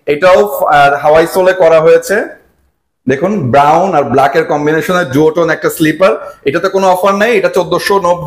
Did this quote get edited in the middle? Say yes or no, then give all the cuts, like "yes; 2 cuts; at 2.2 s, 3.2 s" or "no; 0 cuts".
no; 0 cuts